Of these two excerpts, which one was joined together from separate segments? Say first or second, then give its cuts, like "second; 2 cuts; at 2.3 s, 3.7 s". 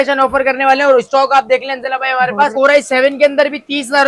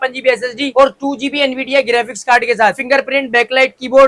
first; 1 cut; at 2.5 s